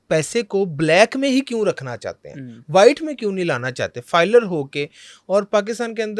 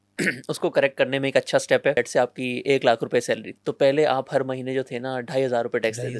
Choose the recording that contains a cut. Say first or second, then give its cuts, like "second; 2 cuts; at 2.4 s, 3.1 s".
second; 2 cuts; at 1.9 s, 3.6 s